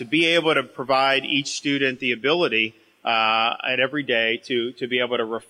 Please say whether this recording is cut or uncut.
uncut